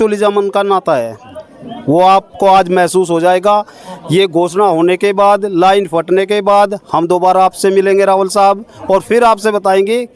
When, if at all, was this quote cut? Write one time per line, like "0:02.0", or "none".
none